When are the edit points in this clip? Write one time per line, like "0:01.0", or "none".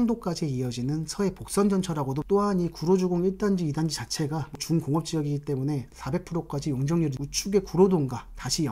0:02.2
0:04.6
0:05.9
0:07.2